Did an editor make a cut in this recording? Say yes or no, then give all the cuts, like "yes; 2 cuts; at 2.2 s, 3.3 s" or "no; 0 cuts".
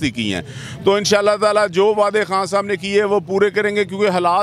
no; 0 cuts